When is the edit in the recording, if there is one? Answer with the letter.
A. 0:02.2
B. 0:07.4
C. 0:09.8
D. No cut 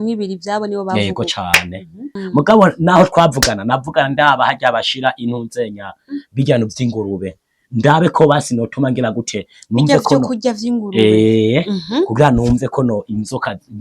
A